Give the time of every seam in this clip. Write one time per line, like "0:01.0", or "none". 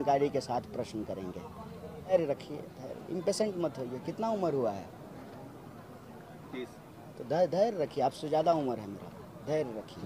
0:02.1